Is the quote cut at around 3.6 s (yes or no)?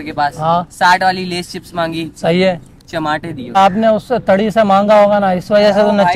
yes